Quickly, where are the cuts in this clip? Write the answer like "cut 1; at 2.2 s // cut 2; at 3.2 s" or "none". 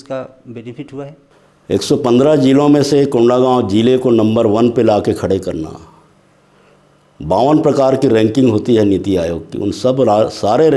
cut 1; at 1.2 s